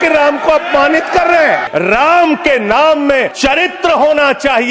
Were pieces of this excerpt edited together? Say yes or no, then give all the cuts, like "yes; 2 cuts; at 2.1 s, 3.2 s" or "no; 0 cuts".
yes; 2 cuts; at 1.6 s, 3.3 s